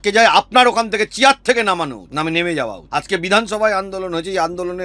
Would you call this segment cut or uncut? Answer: cut